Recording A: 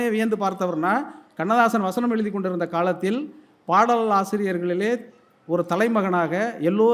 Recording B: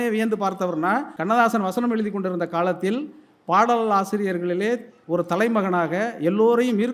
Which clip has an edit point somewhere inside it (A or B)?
B